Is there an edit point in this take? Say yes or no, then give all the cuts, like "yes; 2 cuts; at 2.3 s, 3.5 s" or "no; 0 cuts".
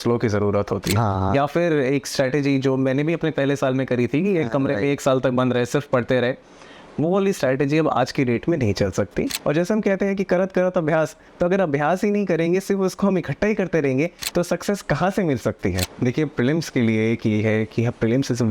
yes; 3 cuts; at 1.0 s, 9.4 s, 15.9 s